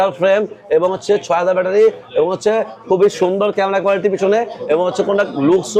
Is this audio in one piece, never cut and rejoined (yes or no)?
yes